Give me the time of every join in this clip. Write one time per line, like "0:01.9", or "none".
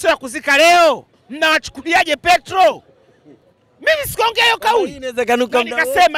none